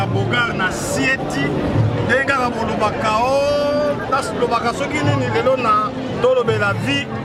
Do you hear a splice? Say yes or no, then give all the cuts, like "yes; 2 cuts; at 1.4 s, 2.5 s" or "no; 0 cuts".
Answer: no; 0 cuts